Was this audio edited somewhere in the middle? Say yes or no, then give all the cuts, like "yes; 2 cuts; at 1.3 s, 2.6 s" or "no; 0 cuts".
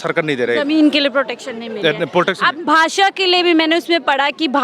no; 0 cuts